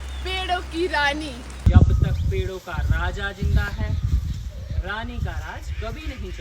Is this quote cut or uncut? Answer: cut